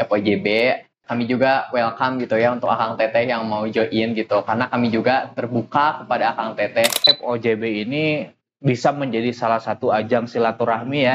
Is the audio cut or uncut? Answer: cut